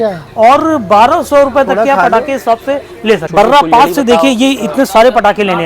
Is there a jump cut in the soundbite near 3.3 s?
yes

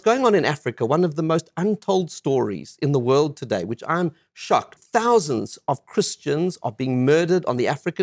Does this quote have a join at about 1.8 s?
no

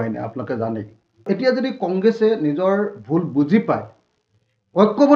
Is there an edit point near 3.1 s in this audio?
no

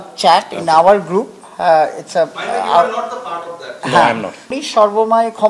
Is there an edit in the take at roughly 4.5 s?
yes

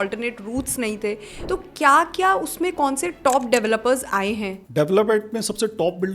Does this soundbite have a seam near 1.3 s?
yes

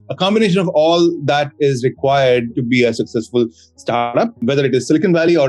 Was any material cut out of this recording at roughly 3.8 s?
no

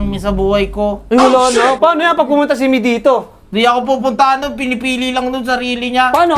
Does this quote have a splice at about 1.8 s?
no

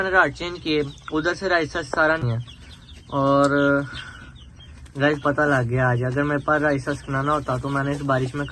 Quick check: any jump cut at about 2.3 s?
yes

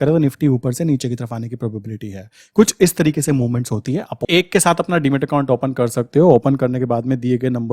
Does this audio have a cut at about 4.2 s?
yes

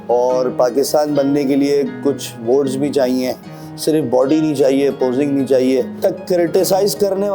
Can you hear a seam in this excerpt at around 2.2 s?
no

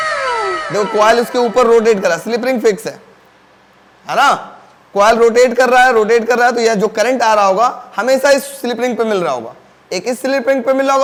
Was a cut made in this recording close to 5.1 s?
no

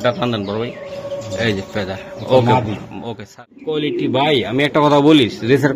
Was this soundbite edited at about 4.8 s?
no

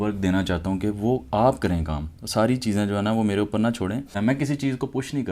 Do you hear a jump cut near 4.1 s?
yes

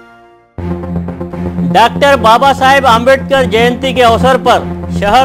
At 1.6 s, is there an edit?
yes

